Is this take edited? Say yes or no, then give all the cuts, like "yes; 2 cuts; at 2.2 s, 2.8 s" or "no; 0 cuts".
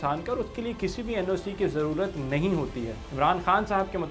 yes; 1 cut; at 3.0 s